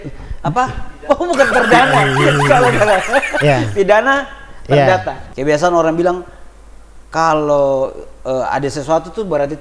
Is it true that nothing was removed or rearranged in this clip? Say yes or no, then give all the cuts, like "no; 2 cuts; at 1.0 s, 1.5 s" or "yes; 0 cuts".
no; 1 cut; at 5.2 s